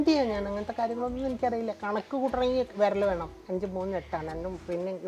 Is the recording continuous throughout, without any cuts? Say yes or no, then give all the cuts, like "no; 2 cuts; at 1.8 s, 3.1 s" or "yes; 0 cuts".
no; 1 cut; at 3.3 s